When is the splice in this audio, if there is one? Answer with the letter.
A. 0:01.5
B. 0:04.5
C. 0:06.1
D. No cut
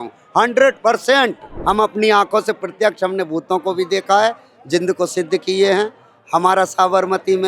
A